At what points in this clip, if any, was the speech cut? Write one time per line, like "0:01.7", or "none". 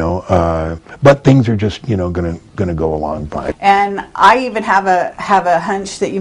0:03.5